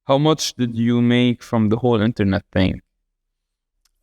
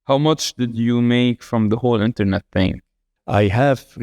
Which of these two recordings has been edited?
second; 1 cut; at 3.1 s

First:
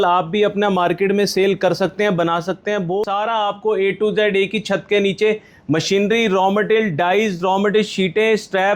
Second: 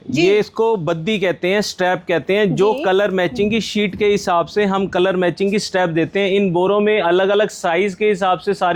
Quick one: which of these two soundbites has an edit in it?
first; 1 cut; at 3.1 s

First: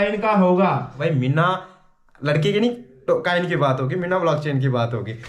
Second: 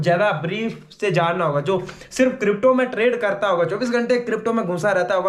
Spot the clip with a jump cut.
first; 1 cut; at 0.9 s

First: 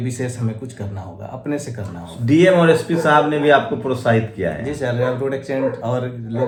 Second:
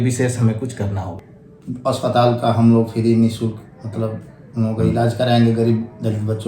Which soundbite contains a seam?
second; 1 cut; at 1.1 s

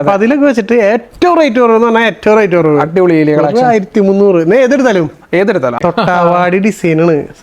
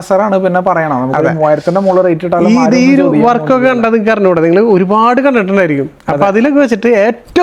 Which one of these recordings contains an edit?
first; 1 cut; at 5.8 s

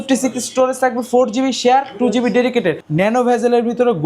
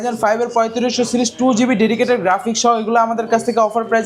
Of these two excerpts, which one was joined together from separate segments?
first; 1 cut; at 2.8 s

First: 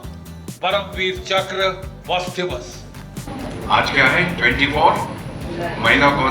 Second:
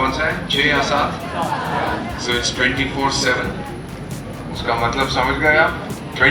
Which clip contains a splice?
first; 1 cut; at 3.2 s

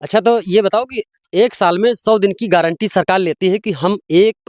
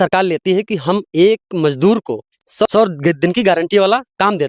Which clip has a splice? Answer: second; 1 cut; at 2.7 s

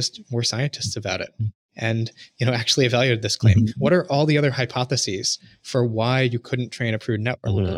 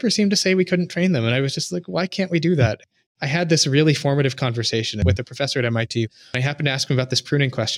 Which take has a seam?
second; 3 cuts; at 2.8 s, 5.0 s, 6.1 s

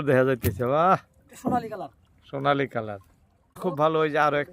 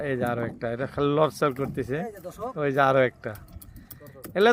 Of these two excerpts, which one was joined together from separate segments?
first; 1 cut; at 3.5 s

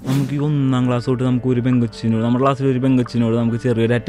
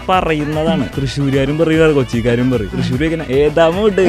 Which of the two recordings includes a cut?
second; 2 cuts; at 1.0 s, 2.8 s

